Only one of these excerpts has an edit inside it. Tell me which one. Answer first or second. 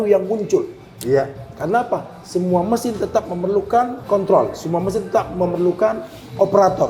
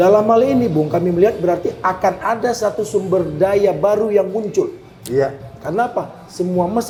first